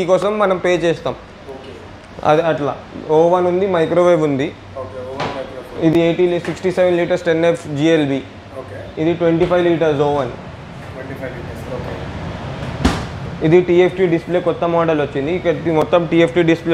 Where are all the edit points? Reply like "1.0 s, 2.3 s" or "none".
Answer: none